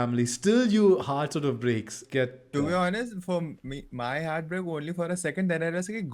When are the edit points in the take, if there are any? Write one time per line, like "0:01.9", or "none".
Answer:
0:02.0